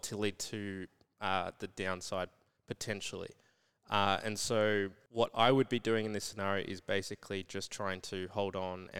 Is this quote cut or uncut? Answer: cut